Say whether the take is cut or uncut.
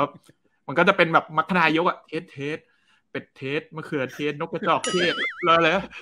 uncut